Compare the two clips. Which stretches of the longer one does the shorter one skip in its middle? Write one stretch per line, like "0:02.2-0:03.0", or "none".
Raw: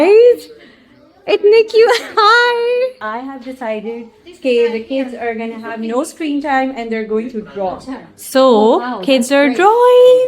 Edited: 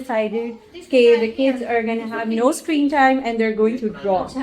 none